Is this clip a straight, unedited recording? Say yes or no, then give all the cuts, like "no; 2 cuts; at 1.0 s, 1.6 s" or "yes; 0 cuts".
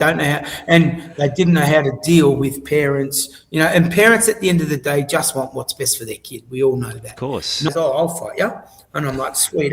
no; 1 cut; at 7.7 s